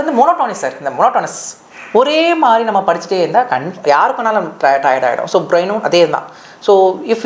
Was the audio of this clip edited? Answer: no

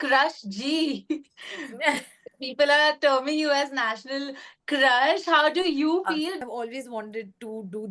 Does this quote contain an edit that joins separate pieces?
yes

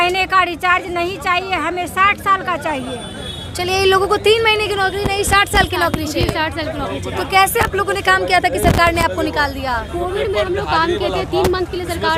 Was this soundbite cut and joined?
no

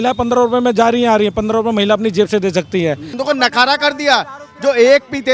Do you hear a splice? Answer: yes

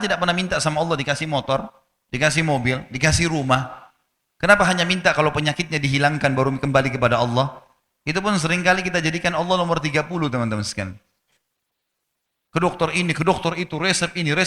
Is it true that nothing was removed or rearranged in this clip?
yes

